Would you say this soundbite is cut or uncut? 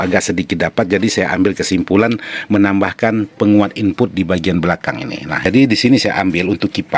cut